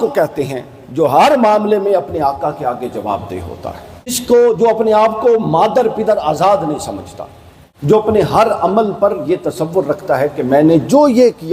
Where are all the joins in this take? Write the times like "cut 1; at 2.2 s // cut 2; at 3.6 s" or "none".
cut 1; at 4.2 s // cut 2; at 7.9 s